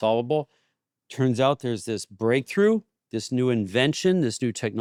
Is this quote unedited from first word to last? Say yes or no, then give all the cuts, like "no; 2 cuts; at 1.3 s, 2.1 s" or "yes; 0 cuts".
yes; 0 cuts